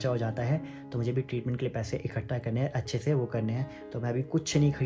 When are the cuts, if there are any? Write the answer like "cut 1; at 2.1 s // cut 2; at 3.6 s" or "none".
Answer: none